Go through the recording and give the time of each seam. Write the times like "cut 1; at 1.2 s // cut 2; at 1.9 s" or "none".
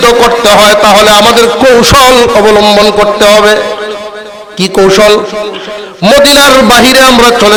none